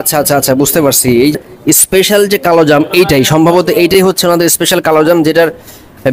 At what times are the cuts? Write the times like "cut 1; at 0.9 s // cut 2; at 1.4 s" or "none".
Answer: cut 1; at 1.3 s